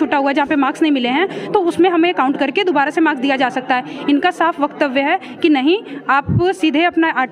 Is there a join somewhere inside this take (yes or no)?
no